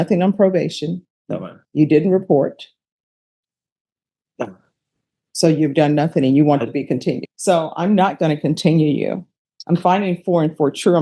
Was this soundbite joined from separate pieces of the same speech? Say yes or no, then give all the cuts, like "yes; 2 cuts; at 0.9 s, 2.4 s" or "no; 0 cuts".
yes; 1 cut; at 7.3 s